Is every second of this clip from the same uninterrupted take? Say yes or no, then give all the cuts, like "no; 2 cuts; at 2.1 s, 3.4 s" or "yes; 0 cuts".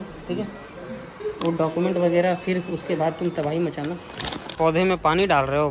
no; 1 cut; at 4.5 s